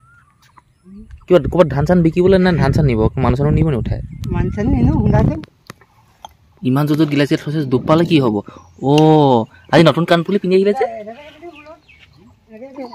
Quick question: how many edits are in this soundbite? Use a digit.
1